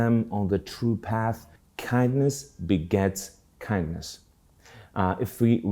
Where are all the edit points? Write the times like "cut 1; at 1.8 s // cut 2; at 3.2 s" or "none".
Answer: cut 1; at 1.5 s